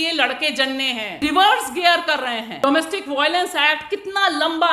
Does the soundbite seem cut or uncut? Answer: cut